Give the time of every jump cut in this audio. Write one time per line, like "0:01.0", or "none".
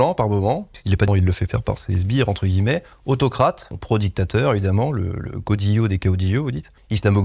0:01.1